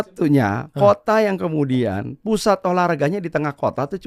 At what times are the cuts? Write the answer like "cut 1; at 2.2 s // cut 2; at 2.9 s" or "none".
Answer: none